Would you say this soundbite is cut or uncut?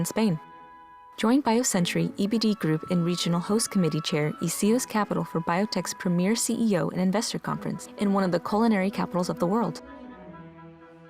cut